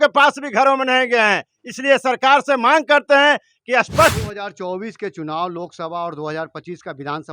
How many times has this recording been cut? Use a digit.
1